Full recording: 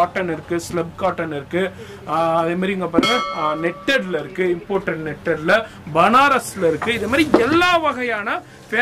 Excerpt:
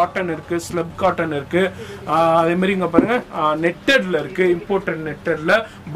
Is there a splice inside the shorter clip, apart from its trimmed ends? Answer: no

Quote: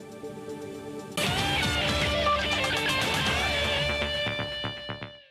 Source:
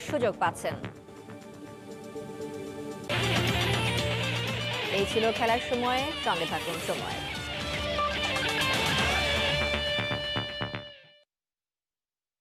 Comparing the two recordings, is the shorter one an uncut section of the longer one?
no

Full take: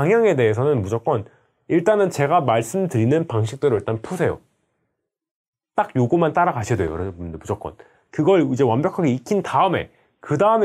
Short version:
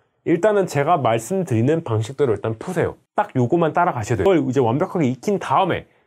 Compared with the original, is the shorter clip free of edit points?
no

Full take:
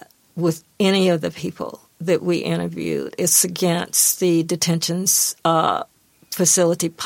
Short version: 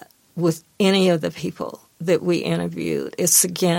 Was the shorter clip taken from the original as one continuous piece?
yes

